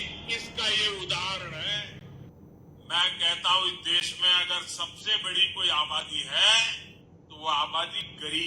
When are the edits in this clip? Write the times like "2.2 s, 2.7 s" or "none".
2.3 s